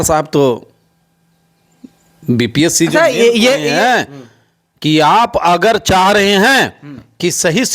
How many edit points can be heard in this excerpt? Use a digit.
1